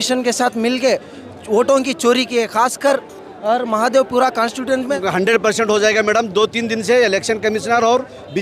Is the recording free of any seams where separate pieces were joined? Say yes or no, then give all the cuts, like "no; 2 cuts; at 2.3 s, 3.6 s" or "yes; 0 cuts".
no; 1 cut; at 4.9 s